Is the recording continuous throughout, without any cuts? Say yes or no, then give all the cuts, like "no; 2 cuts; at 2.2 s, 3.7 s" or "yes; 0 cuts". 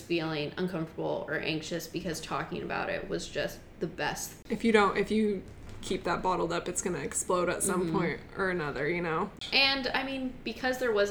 no; 2 cuts; at 4.3 s, 9.4 s